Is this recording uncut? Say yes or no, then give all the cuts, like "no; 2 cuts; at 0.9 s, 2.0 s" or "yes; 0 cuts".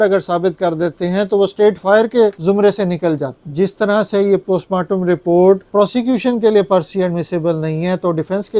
no; 3 cuts; at 2.4 s, 3.4 s, 5.6 s